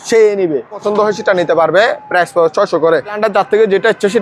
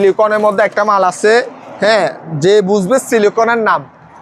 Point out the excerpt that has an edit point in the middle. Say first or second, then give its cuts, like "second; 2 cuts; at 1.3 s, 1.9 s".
first; 2 cuts; at 0.8 s, 3.2 s